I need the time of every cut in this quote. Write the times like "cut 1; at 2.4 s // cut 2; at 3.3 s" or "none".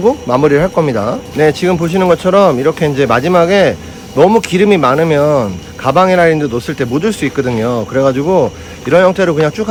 none

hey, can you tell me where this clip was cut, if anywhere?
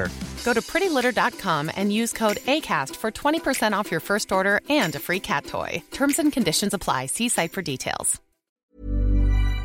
cut 1; at 8.5 s

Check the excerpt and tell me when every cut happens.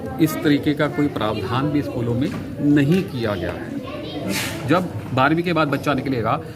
cut 1; at 4.3 s

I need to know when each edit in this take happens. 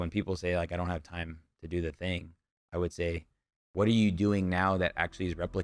none

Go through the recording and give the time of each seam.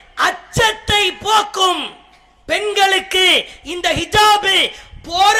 none

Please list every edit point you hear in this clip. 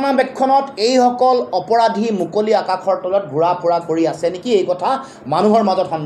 none

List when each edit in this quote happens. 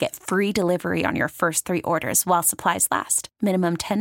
none

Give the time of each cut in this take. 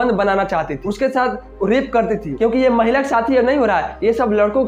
cut 1; at 2.3 s

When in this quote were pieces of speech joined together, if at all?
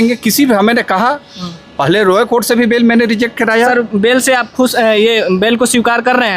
cut 1; at 3.7 s

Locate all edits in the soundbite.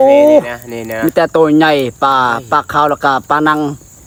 none

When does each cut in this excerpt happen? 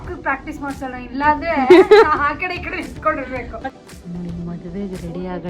cut 1; at 3.7 s

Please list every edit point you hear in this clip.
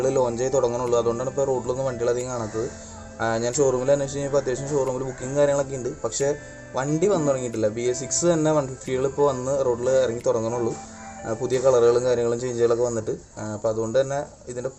none

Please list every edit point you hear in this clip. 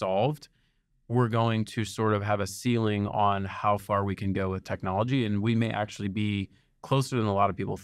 none

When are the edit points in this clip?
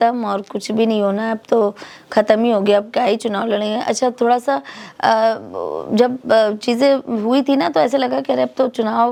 none

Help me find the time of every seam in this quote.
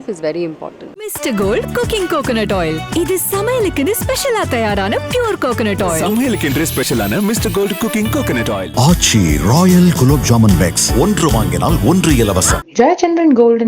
cut 1; at 0.9 s

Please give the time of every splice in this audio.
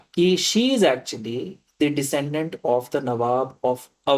none

